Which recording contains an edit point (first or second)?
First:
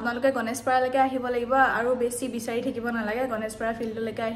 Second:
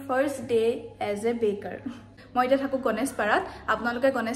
second